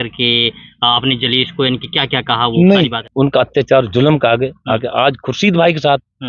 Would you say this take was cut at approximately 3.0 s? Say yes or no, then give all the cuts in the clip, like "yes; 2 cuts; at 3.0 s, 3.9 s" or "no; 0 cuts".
yes; 1 cut; at 3.0 s